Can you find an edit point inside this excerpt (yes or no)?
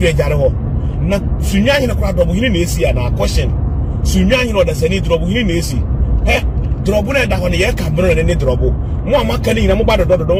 no